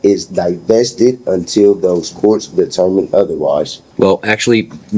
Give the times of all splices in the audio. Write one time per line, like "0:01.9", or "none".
0:03.8